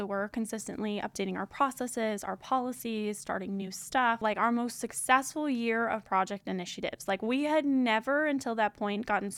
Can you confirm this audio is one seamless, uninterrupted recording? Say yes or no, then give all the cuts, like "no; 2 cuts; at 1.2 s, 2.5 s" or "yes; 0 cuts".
no; 1 cut; at 4.2 s